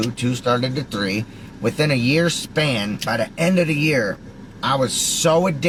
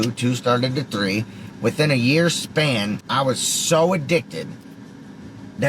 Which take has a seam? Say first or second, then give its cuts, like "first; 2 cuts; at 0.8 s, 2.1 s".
second; 1 cut; at 3.0 s